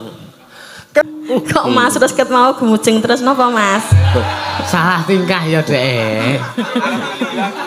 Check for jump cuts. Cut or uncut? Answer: cut